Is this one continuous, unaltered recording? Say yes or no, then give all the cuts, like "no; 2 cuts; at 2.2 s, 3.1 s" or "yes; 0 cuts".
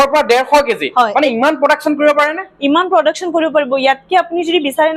yes; 0 cuts